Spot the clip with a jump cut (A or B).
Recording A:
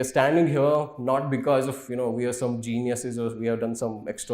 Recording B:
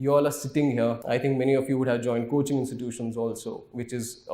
B